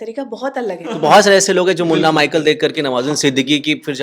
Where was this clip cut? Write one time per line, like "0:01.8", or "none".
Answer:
0:01.0